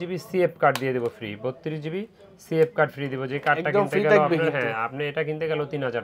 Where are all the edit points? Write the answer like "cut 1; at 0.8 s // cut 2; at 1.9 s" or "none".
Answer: none

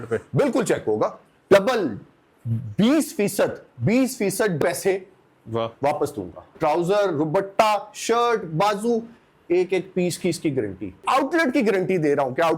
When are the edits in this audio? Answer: cut 1; at 1.3 s // cut 2; at 4.6 s // cut 3; at 6.5 s // cut 4; at 11.0 s

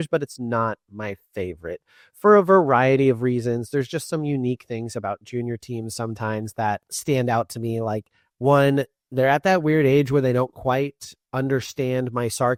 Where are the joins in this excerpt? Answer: none

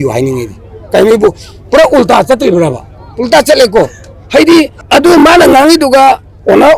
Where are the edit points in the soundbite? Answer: cut 1; at 4.8 s

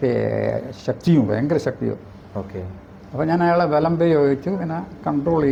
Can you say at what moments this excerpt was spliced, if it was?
none

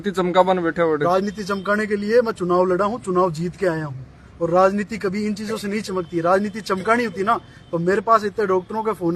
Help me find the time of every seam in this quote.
none

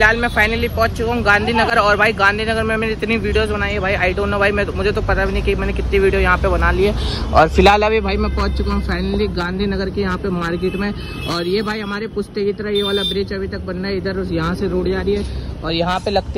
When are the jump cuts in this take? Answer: none

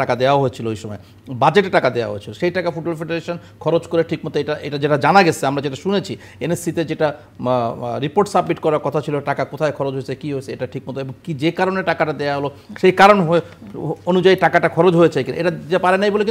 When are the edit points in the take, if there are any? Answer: none

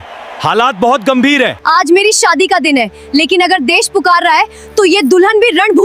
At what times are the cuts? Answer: cut 1; at 1.6 s

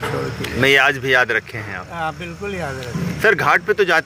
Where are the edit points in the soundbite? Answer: none

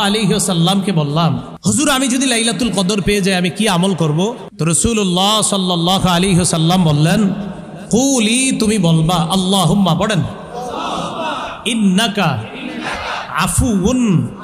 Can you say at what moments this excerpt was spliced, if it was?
cut 1; at 1.5 s // cut 2; at 4.5 s

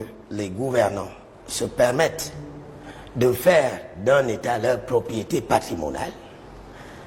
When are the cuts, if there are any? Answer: none

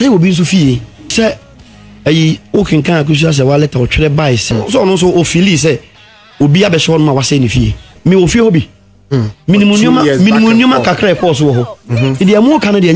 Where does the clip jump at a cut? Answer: cut 1; at 1.1 s // cut 2; at 4.4 s // cut 3; at 7.9 s

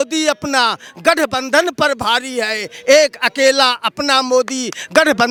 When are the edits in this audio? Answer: none

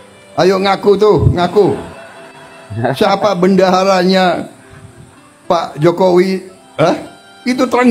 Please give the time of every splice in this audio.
none

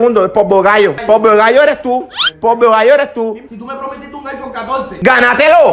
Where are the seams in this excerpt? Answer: cut 1; at 1.0 s // cut 2; at 3.4 s

